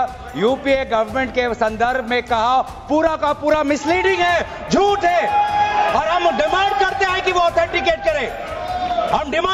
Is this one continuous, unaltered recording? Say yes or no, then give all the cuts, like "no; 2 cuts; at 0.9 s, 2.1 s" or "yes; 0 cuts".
yes; 0 cuts